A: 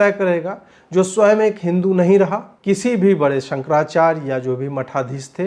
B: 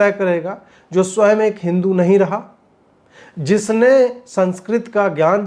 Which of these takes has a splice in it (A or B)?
A